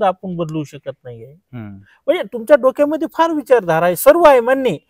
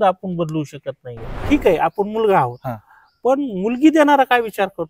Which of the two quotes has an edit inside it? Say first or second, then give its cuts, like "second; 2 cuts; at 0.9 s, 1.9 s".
second; 1 cut; at 1.4 s